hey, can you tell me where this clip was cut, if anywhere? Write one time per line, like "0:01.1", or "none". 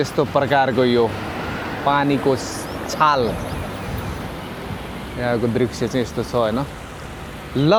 none